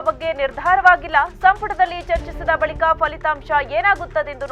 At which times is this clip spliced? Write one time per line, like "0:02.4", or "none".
none